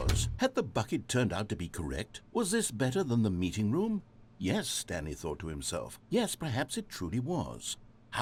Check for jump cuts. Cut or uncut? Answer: uncut